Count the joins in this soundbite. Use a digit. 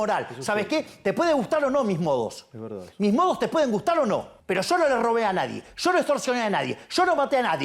1